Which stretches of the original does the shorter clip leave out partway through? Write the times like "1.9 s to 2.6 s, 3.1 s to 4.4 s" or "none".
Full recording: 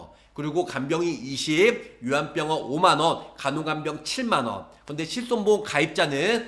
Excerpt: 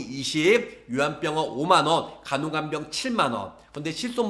none